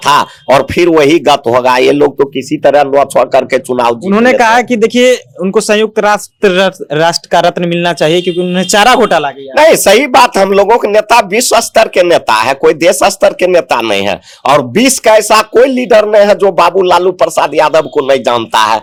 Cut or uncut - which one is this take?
uncut